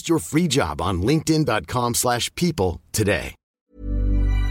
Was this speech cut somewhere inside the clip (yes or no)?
yes